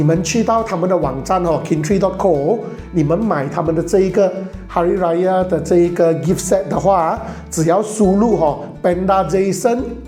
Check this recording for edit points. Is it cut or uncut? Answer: uncut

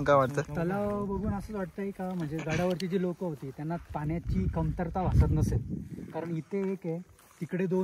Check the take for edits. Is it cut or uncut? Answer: uncut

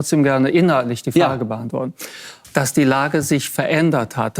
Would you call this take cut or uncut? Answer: cut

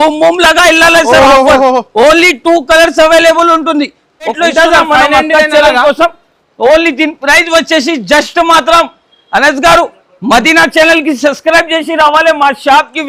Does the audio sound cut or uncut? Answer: cut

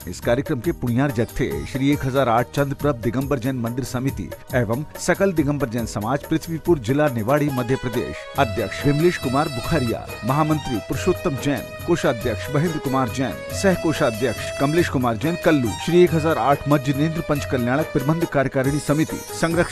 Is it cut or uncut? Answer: uncut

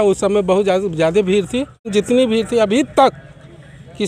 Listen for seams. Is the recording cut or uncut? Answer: cut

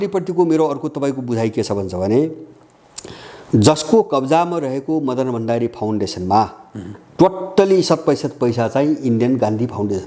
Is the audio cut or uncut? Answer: uncut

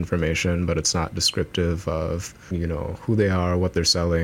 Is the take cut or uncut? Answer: cut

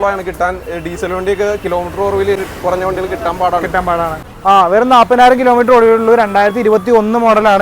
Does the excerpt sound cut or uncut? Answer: cut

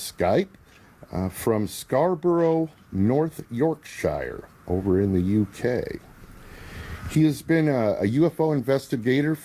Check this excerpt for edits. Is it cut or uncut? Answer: uncut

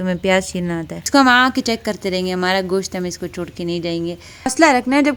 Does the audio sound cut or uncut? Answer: cut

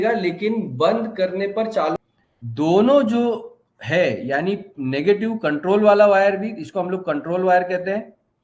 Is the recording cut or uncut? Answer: cut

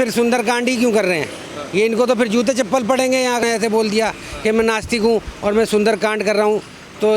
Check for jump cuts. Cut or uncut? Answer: cut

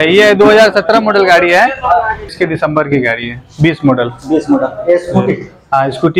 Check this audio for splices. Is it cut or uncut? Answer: cut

